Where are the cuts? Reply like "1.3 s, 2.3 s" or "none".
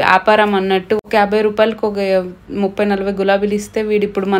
1.0 s